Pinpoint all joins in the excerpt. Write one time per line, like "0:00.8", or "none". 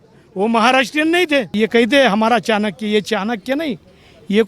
0:01.5